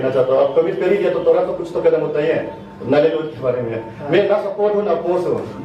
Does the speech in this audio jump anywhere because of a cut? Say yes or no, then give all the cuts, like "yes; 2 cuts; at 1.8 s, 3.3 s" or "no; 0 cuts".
no; 0 cuts